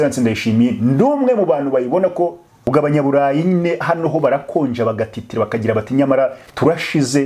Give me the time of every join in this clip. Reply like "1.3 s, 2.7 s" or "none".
2.7 s